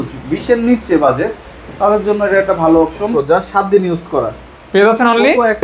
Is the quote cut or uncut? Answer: cut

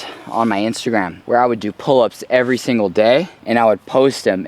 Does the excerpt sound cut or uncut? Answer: cut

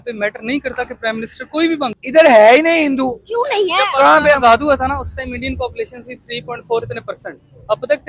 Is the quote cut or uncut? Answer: cut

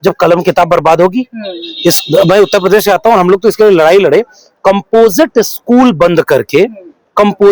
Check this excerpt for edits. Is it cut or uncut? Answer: uncut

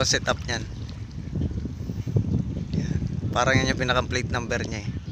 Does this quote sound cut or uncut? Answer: uncut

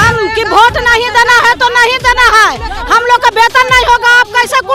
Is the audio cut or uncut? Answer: uncut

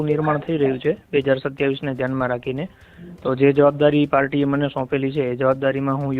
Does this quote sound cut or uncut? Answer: uncut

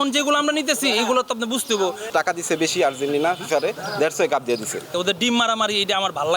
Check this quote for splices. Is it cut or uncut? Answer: cut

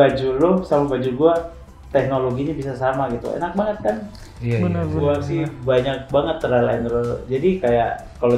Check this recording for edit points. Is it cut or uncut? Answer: uncut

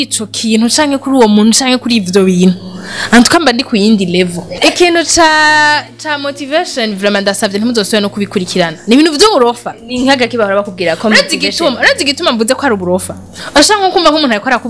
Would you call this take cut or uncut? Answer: cut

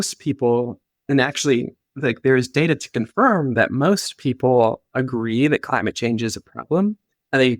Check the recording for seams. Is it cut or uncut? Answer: uncut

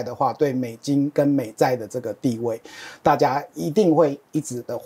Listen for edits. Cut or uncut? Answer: uncut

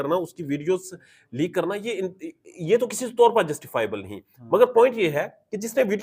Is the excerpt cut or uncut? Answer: uncut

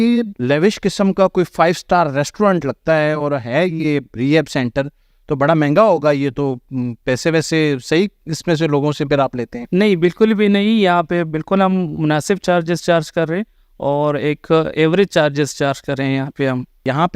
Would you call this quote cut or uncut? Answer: uncut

